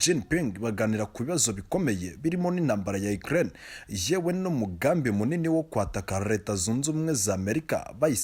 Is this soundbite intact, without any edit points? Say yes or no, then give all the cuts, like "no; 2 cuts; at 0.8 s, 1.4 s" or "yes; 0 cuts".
yes; 0 cuts